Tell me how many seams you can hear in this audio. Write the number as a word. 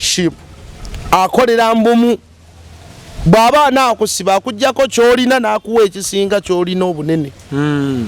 zero